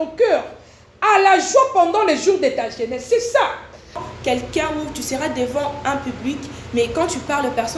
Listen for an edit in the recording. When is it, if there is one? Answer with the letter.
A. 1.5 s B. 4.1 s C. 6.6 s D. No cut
B